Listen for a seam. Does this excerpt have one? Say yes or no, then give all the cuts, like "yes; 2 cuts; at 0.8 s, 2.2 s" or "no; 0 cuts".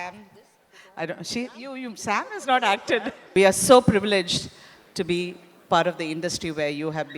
yes; 1 cut; at 3.2 s